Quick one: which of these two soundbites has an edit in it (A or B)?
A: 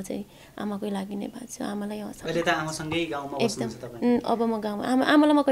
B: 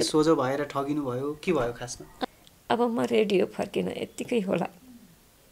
B